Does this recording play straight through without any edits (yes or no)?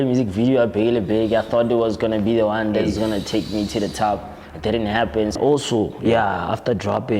no